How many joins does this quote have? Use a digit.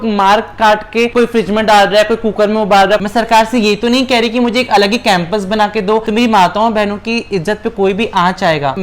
2